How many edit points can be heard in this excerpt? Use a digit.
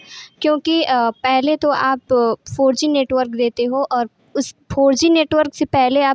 0